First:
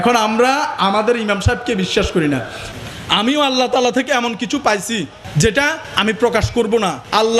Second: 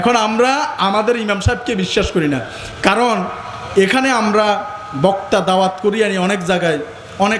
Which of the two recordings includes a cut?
first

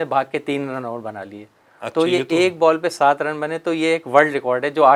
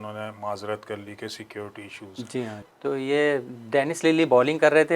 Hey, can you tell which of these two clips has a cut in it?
second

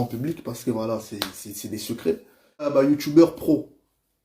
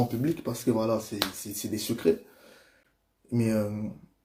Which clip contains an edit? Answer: first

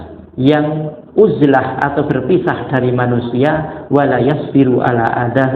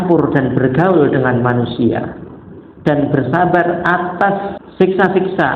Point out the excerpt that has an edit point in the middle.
second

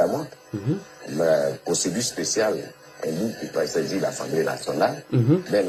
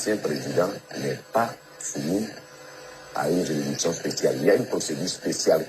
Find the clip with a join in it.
second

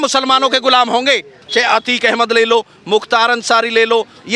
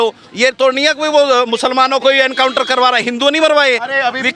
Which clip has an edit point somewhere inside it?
first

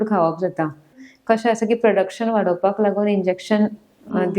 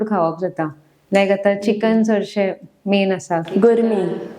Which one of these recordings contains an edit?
first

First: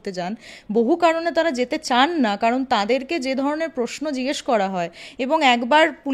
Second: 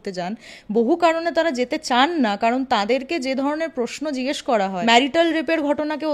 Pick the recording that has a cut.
second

